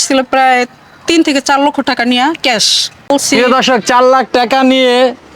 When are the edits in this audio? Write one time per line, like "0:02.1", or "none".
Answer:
0:03.1